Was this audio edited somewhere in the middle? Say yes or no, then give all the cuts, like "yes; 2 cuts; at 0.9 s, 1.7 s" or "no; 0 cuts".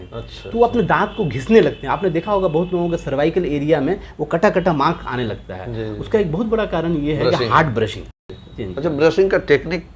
yes; 1 cut; at 8.3 s